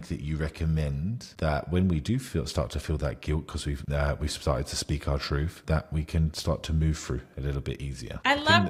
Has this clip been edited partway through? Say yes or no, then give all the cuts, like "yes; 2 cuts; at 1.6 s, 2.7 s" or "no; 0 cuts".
no; 0 cuts